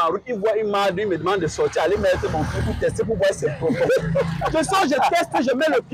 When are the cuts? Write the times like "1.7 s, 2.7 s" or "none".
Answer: none